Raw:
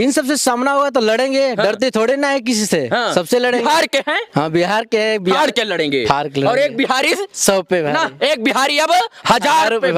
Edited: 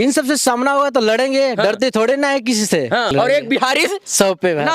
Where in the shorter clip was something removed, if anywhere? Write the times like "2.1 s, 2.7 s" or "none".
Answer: 3.1 s